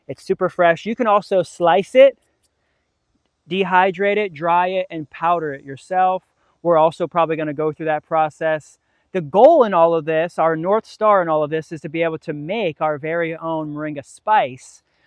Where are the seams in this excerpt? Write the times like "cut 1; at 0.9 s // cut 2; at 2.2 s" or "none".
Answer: none